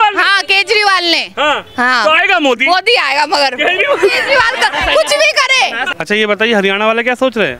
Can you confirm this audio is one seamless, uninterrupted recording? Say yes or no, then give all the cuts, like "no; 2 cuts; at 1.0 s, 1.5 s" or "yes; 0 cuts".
no; 1 cut; at 5.8 s